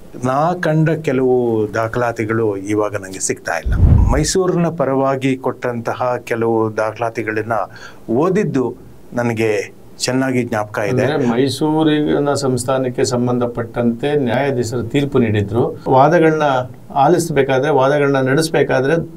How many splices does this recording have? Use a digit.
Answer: 2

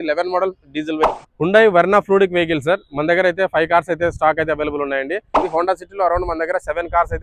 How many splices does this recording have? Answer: 2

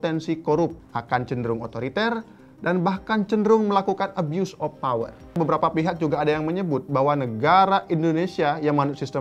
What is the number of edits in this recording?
2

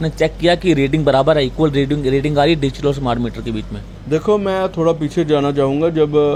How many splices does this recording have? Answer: 0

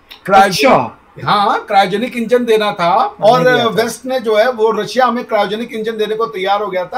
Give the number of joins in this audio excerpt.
1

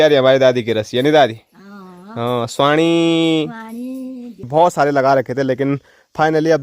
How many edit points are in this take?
1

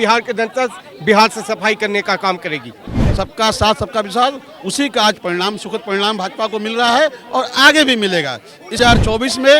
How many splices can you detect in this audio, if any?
2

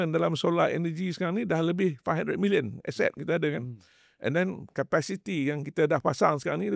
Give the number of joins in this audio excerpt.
0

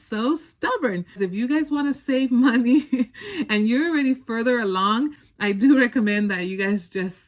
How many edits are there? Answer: 2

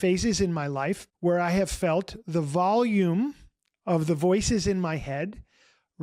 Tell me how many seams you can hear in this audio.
1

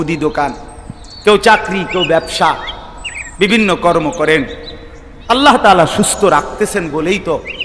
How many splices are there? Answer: 0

